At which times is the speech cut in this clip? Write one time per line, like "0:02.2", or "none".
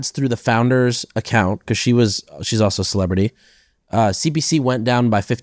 none